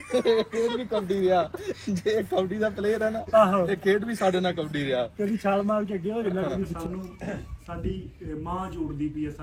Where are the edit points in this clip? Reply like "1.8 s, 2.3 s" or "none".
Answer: 6.7 s